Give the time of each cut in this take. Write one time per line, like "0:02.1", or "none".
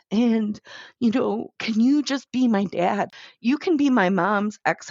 0:03.1